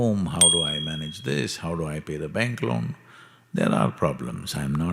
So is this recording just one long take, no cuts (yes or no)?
yes